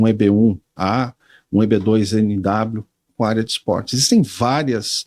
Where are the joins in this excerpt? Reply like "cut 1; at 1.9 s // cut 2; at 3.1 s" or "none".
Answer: none